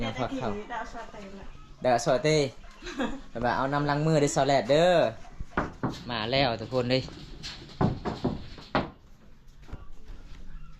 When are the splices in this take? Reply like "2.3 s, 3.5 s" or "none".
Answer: none